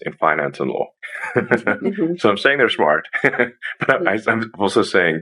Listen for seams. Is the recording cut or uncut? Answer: uncut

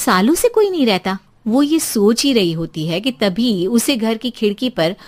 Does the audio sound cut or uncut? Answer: uncut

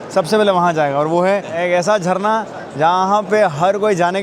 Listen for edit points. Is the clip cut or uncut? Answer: cut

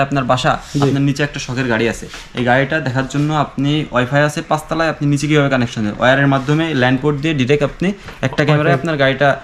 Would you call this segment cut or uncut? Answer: uncut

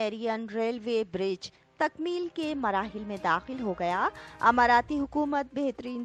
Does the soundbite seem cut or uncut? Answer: uncut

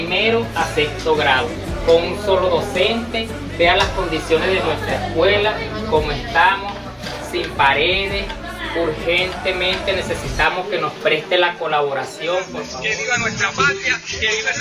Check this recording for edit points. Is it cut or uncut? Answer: cut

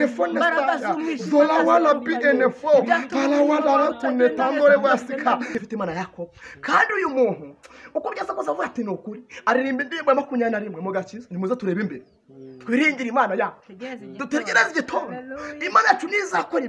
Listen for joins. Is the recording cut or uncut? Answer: cut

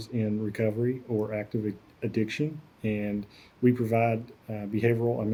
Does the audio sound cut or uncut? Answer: uncut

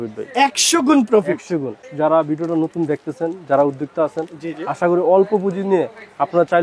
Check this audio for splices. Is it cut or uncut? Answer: cut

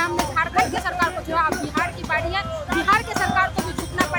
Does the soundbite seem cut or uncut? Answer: uncut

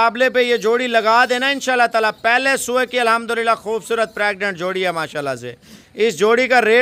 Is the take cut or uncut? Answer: uncut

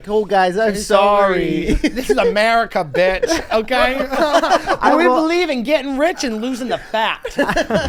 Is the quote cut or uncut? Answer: uncut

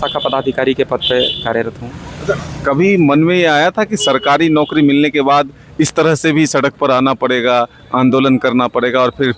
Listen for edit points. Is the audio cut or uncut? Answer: uncut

